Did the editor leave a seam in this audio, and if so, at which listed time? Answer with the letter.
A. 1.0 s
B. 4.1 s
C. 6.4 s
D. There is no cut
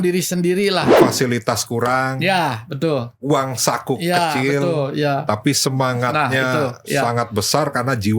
A